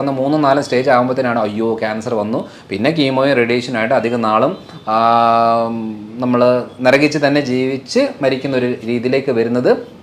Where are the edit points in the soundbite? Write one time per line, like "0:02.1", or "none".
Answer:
none